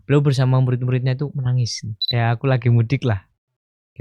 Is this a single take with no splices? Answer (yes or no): no